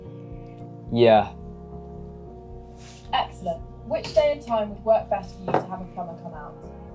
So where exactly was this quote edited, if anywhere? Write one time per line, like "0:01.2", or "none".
0:00.9